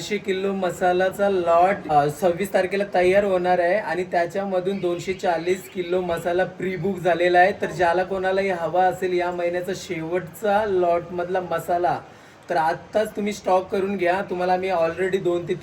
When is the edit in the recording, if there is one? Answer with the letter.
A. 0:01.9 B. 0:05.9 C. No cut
A